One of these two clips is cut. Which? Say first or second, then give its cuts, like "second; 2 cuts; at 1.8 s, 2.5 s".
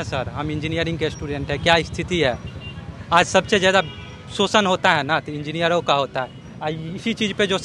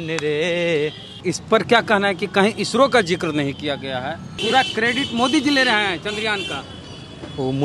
second; 3 cuts; at 1.1 s, 4.3 s, 6.6 s